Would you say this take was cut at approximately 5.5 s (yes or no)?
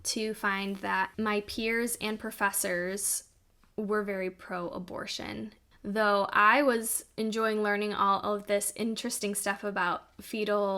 yes